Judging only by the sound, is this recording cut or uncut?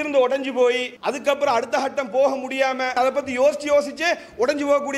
cut